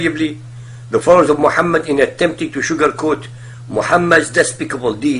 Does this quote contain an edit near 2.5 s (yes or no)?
yes